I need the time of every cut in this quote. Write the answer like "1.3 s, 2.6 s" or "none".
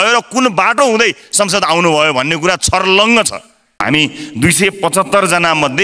3.8 s